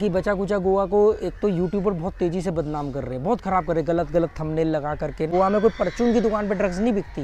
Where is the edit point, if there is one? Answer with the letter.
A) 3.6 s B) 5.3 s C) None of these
B